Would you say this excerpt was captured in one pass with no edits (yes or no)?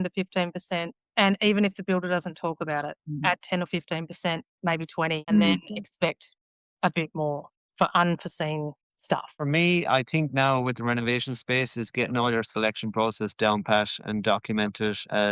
no